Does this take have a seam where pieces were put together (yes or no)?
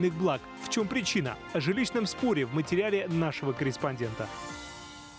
yes